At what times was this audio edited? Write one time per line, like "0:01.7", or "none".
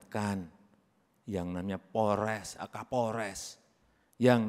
none